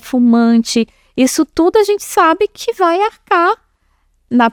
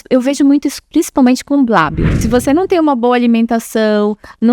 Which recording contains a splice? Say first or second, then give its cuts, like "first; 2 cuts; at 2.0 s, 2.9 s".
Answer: second; 1 cut; at 2.1 s